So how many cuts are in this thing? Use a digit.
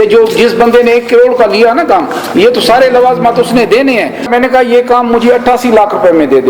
1